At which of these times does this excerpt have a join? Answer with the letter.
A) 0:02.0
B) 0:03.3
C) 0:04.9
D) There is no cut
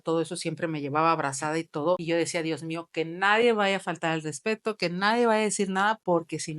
A